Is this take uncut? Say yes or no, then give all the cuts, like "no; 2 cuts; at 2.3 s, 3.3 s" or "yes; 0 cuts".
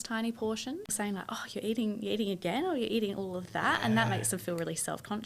no; 1 cut; at 0.9 s